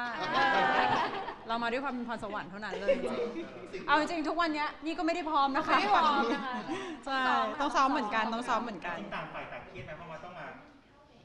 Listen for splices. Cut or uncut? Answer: uncut